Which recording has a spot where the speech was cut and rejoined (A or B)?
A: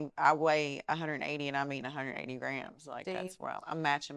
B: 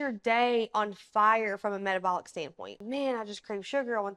B